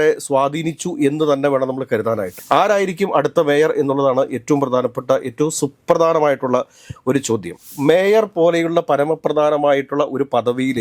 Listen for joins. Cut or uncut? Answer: cut